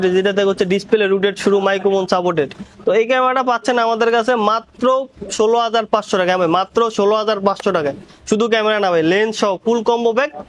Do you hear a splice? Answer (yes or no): no